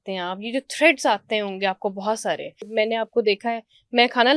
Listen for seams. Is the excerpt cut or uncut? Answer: cut